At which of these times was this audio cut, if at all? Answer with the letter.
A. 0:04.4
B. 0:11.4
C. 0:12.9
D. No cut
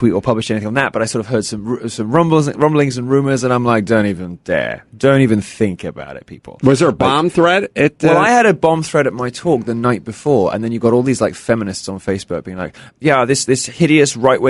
C